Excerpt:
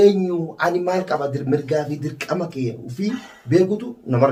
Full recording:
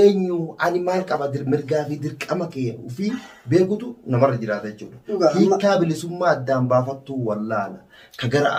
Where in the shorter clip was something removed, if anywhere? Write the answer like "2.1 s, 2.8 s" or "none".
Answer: none